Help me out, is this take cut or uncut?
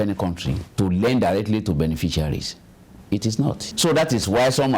cut